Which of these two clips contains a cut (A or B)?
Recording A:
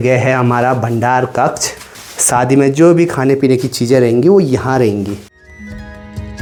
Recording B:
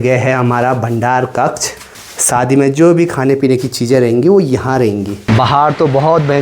B